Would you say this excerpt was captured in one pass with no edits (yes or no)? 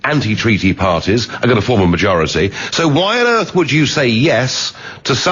yes